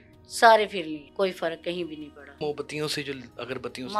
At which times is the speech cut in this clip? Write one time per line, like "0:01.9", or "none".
0:01.1
0:02.4